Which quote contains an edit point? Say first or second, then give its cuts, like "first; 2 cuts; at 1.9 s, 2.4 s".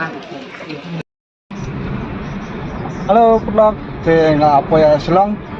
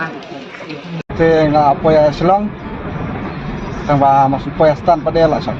second; 1 cut; at 1.0 s